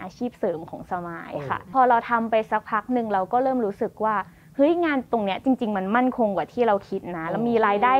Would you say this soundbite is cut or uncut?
cut